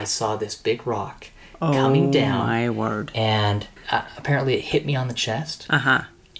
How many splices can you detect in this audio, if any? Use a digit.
1